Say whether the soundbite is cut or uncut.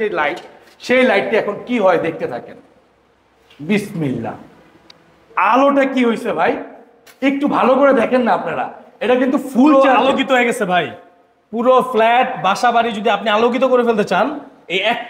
uncut